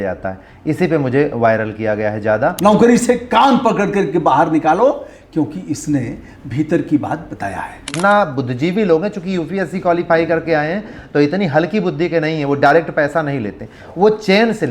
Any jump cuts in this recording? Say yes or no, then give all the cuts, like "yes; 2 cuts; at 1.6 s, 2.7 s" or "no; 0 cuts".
yes; 2 cuts; at 2.6 s, 7.9 s